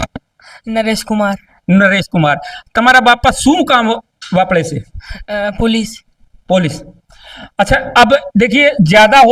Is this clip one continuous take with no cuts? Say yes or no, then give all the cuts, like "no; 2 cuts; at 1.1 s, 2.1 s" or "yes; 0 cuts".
yes; 0 cuts